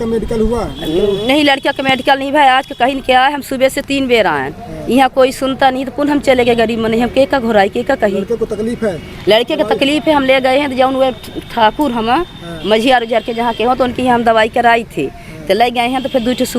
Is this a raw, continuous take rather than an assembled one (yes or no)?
yes